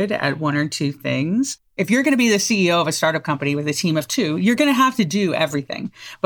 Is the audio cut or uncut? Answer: cut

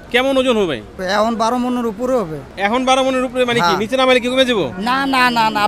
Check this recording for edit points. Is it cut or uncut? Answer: cut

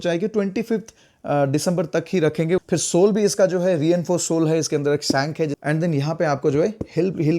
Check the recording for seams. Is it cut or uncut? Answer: cut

